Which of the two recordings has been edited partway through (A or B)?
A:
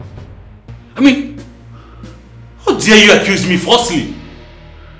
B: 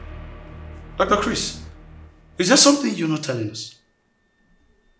B